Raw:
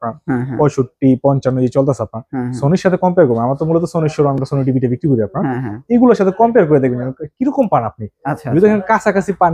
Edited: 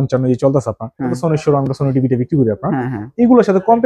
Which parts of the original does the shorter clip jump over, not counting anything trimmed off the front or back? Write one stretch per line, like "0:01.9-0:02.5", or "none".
0:02.5-0:03.9